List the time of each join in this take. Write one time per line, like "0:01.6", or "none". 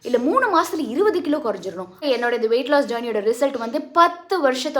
0:02.0